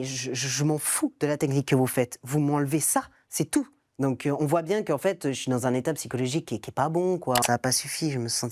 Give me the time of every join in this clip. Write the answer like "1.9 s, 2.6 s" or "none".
3.8 s, 7.4 s